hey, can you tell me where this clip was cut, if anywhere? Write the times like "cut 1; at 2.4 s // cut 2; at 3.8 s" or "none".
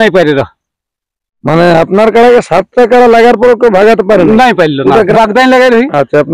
cut 1; at 5.1 s